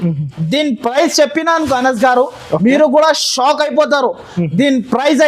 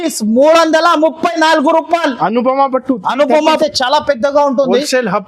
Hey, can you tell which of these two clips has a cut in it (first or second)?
second